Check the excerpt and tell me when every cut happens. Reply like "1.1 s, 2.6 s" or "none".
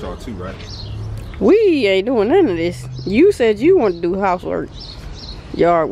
none